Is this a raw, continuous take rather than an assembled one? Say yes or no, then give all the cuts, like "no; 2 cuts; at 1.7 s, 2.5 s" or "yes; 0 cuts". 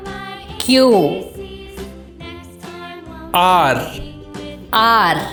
yes; 0 cuts